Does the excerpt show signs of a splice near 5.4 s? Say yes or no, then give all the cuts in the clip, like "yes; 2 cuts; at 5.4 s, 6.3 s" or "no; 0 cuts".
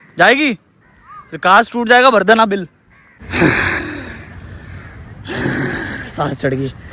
no; 1 cut; at 3.2 s